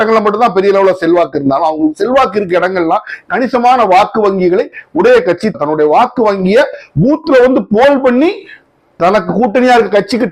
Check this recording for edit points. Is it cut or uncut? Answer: uncut